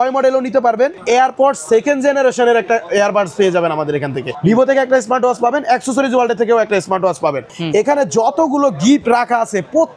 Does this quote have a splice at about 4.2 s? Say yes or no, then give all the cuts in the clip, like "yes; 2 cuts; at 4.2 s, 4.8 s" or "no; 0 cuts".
yes; 3 cuts; at 1.0 s, 4.2 s, 7.5 s